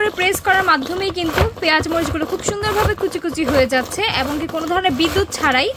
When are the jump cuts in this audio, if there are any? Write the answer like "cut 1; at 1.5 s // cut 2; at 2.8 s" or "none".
none

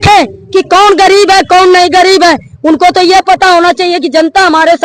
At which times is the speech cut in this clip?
none

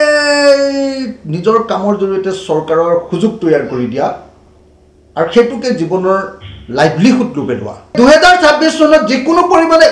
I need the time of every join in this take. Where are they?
cut 1; at 7.9 s

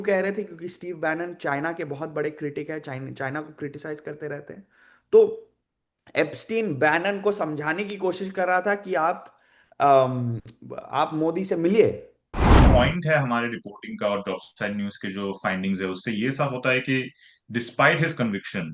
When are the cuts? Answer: cut 1; at 12.6 s

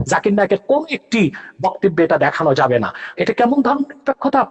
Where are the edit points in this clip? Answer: cut 1; at 3.1 s

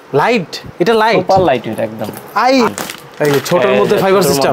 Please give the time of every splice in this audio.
cut 1; at 2.7 s

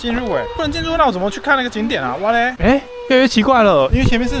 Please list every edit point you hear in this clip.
cut 1; at 2.5 s

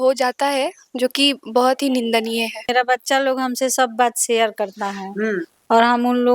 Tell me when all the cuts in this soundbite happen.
cut 1; at 2.7 s

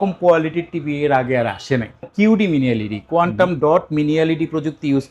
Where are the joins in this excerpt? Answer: cut 1; at 2.1 s

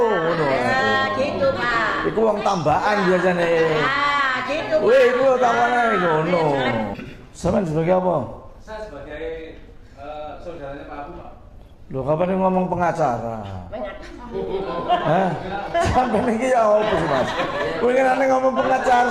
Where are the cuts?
cut 1; at 6.9 s

